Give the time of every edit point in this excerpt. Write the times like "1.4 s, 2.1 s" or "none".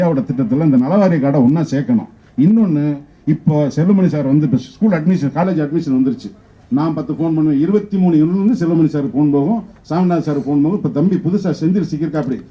none